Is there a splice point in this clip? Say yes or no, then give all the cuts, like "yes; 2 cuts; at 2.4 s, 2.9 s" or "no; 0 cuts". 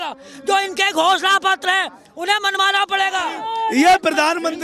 yes; 1 cut; at 3.4 s